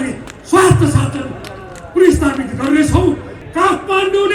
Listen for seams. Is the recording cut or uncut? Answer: cut